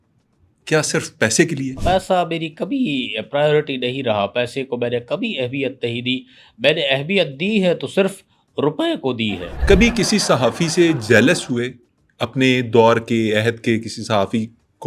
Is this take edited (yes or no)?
yes